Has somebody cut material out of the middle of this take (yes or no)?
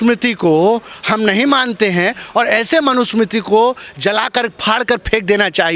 no